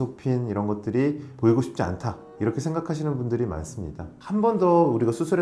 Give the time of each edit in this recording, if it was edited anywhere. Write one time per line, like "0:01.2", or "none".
0:04.1

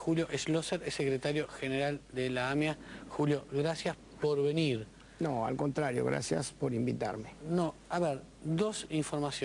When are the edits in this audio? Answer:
0:01.3

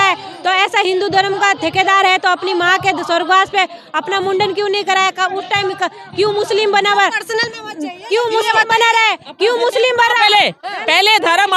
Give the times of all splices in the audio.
none

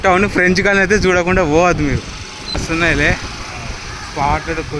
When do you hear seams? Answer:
0:02.6

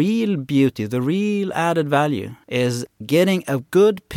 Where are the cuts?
0:02.4

